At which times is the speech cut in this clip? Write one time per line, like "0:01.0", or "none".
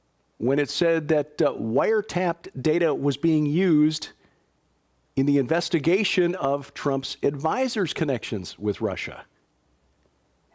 none